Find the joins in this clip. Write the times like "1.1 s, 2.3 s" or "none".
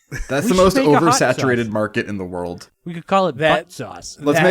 2.7 s